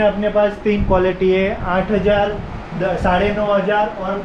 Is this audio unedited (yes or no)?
yes